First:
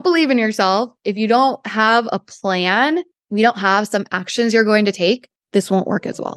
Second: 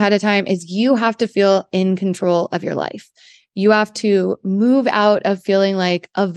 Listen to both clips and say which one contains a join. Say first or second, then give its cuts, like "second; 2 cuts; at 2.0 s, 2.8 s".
first; 2 cuts; at 3.2 s, 5.3 s